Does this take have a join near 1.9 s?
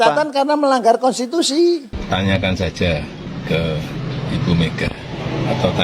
yes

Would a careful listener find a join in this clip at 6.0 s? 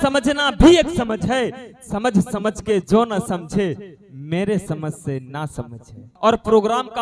yes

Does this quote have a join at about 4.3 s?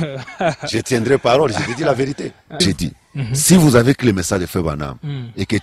no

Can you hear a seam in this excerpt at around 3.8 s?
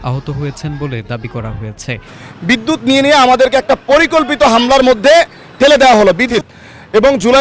no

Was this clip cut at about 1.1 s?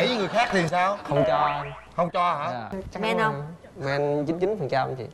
no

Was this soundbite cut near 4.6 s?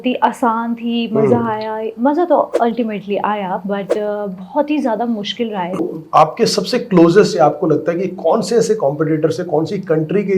no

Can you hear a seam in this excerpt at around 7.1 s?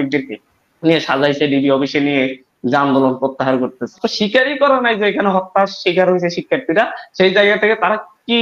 no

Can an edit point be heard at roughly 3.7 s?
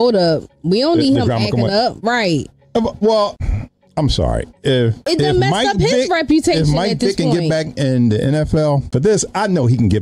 no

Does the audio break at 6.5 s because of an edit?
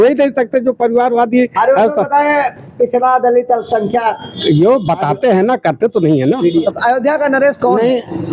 yes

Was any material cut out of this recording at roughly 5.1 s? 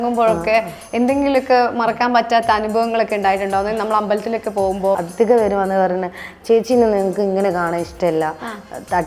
yes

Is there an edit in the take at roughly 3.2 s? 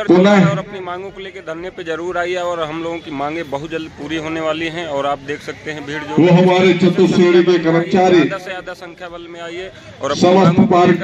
no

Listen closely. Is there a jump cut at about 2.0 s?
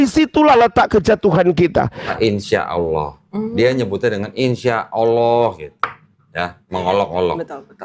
yes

